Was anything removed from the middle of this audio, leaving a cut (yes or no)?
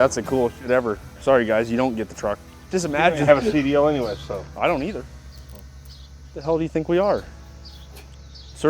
yes